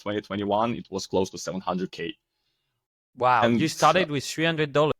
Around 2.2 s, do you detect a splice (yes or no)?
no